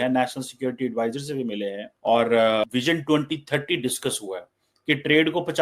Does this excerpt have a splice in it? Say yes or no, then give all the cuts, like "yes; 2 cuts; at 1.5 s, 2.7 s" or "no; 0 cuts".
yes; 2 cuts; at 1.9 s, 2.6 s